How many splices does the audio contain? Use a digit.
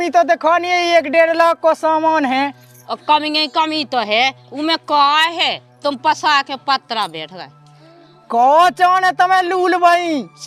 0